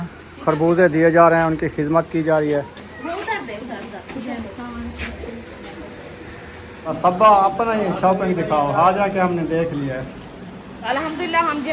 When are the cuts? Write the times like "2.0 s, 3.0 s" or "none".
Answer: 2.8 s, 6.9 s, 10.9 s